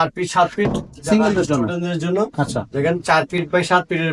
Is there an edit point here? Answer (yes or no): no